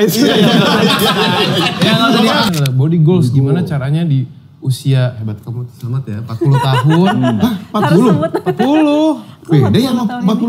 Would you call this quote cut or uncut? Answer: cut